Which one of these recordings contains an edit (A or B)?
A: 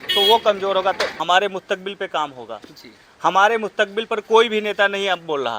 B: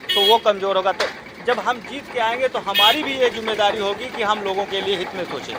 A